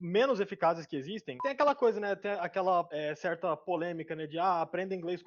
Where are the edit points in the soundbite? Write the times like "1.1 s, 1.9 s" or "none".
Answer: 1.4 s